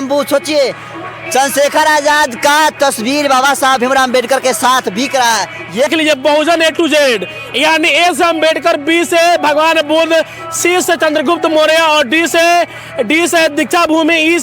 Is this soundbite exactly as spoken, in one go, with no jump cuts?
no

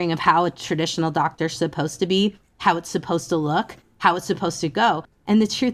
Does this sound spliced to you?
no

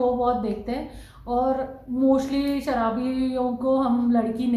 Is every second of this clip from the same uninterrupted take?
yes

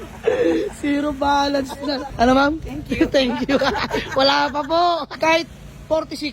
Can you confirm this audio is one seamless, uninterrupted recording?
no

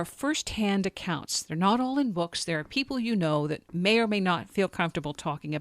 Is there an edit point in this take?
no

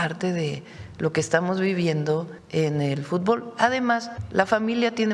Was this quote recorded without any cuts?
no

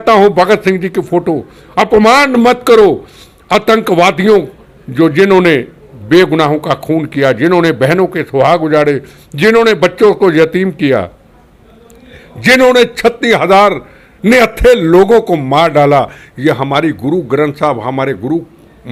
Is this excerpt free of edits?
yes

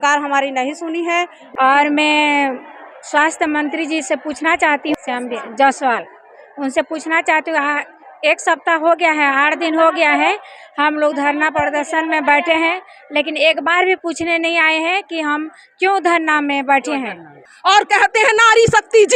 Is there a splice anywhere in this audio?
yes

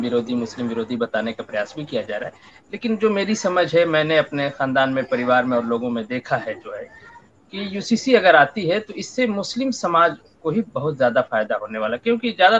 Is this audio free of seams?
yes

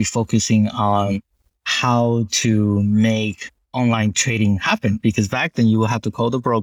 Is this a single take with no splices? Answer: yes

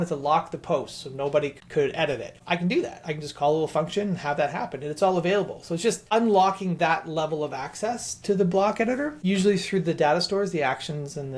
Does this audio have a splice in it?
no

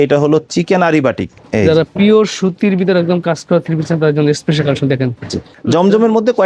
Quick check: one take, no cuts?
no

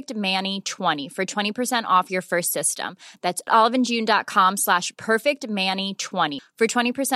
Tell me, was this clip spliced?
yes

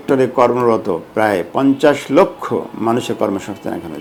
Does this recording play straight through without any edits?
yes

